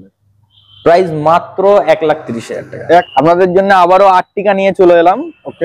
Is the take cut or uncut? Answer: cut